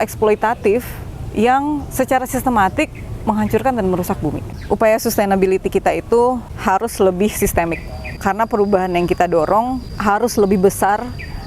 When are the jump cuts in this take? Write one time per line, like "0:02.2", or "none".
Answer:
0:04.5
0:06.5
0:08.2
0:09.9